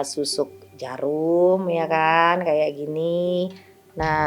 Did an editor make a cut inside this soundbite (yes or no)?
no